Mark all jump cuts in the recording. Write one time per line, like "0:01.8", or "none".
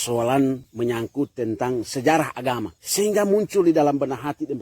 0:02.8